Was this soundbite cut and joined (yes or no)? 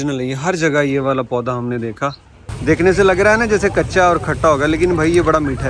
yes